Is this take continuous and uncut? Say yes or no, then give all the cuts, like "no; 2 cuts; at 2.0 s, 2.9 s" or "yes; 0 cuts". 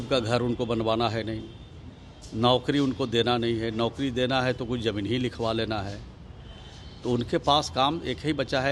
yes; 0 cuts